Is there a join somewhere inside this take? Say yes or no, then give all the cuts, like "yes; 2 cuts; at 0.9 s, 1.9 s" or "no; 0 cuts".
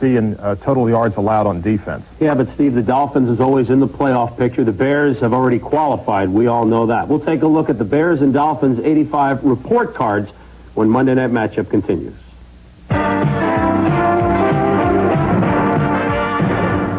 no; 0 cuts